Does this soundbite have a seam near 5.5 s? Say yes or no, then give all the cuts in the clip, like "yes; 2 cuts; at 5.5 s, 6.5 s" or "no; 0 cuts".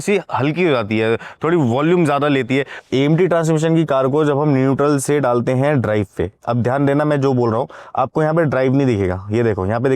no; 1 cut; at 2.8 s